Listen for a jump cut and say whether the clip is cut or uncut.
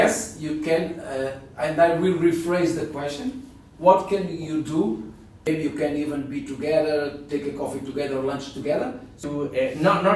cut